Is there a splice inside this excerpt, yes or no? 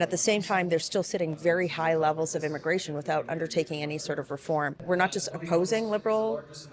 yes